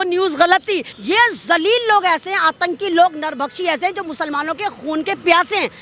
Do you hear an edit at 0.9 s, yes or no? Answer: yes